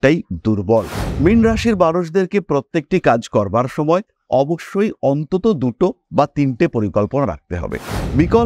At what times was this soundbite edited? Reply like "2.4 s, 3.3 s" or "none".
1.0 s

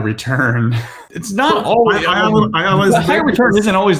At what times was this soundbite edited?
0.9 s

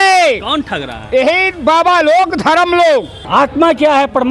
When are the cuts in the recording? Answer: 3.2 s

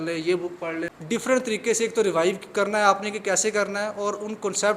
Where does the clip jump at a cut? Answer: 0.9 s

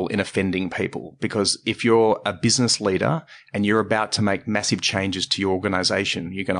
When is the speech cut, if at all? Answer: none

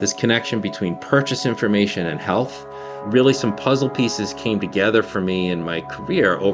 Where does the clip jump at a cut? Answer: none

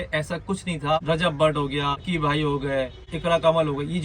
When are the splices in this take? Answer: 1.0 s, 2.0 s

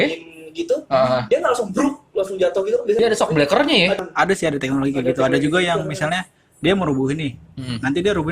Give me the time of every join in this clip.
3.0 s, 4.0 s

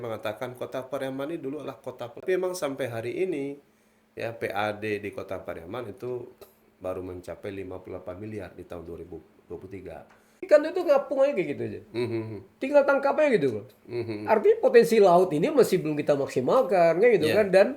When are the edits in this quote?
2.2 s, 10.4 s

